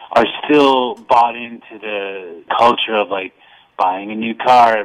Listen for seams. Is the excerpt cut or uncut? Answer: cut